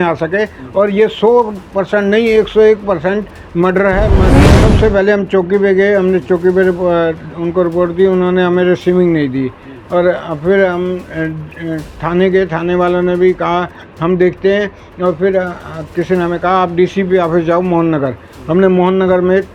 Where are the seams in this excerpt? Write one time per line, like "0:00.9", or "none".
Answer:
0:04.4

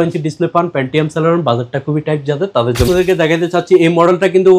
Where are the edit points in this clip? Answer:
0:02.9

